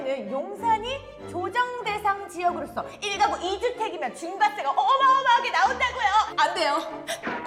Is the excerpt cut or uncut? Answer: uncut